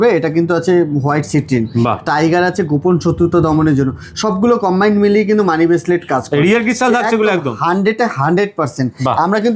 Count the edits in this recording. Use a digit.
0